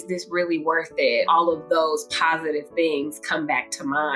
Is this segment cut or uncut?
cut